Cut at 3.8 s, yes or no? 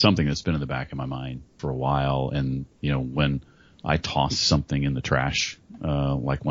no